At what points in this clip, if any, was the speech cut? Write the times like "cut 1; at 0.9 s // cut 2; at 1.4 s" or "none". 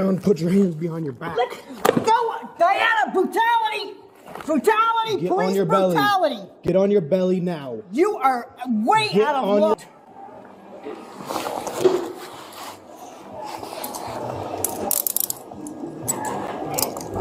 none